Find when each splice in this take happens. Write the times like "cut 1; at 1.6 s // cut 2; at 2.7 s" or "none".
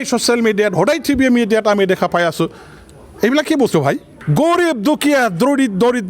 cut 1; at 4.1 s